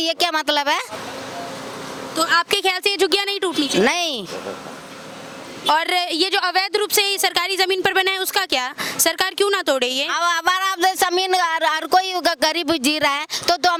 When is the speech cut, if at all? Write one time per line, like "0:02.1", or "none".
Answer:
none